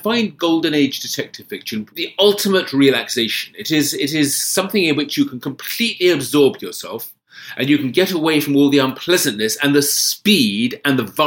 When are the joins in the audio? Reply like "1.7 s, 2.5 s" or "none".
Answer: 1.9 s